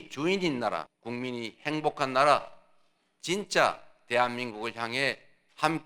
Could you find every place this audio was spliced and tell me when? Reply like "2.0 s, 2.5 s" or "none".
1.0 s